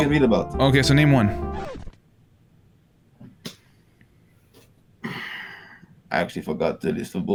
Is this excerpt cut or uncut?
uncut